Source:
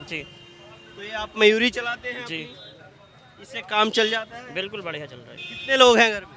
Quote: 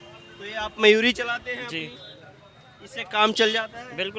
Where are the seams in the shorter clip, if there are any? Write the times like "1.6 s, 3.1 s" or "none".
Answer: none